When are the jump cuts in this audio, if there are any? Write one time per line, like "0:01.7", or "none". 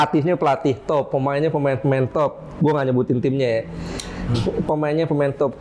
none